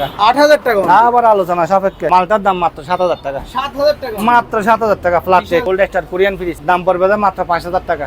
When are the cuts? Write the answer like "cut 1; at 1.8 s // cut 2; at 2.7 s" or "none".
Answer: cut 1; at 2.1 s // cut 2; at 5.7 s // cut 3; at 6.6 s